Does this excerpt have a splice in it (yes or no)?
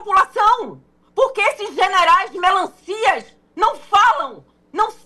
no